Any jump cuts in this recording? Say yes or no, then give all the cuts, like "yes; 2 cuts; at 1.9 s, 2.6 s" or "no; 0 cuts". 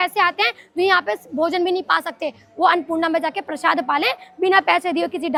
no; 0 cuts